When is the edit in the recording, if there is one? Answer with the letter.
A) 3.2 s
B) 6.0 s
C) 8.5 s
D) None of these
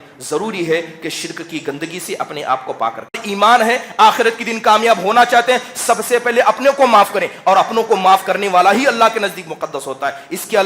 A